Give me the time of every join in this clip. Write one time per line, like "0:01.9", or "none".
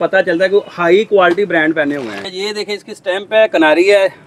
0:02.3